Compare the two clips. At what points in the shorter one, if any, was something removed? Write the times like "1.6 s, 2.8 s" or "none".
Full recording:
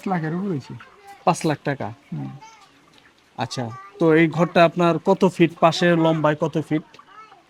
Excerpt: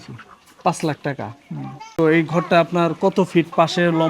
2.0 s